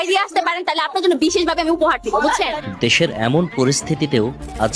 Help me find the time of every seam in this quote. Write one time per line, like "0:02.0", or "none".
0:02.6

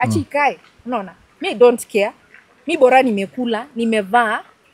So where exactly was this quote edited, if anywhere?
none

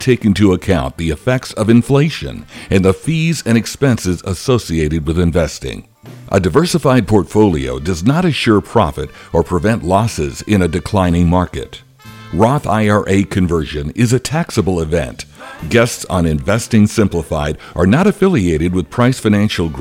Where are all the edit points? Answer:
none

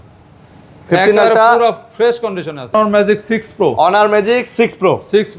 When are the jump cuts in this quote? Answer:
0:02.7

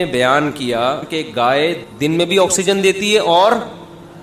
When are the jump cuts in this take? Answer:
0:01.1
0:01.8

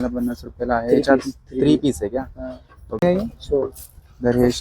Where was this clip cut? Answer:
0:02.9

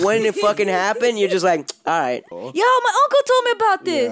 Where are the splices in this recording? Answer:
0:02.3

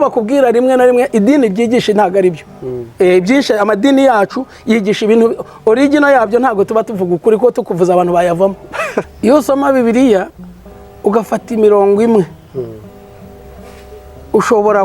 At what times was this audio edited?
0:09.0

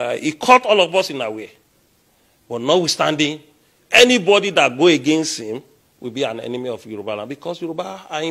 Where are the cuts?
none

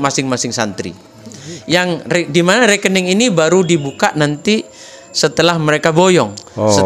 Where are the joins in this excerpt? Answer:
none

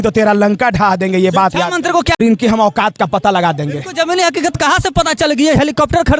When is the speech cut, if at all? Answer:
0:02.2

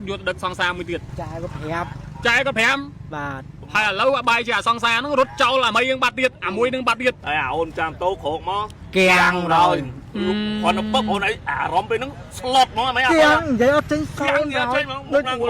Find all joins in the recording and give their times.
0:01.1
0:03.5
0:07.2

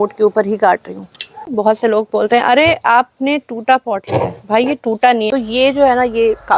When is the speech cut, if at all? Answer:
0:01.5
0:05.3

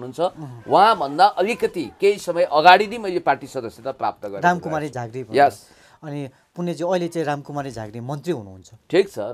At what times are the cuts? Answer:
none

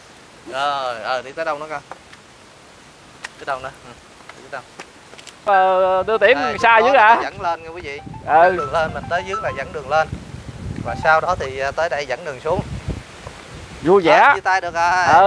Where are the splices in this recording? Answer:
0:05.4

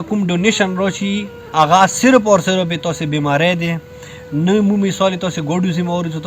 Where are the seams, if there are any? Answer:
0:01.4

